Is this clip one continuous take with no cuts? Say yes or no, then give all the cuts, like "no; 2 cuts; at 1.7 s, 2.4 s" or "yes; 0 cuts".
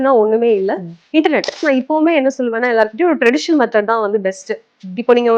no; 1 cut; at 1.6 s